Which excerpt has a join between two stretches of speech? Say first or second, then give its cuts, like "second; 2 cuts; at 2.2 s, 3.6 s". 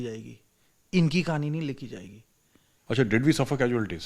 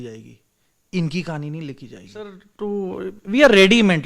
second; 1 cut; at 2.4 s